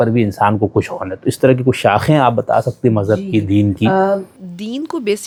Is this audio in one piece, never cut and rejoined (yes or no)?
yes